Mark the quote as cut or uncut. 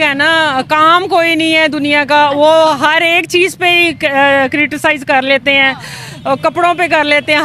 uncut